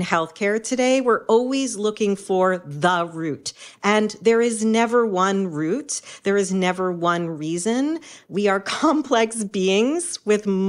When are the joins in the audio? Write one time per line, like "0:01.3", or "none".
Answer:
none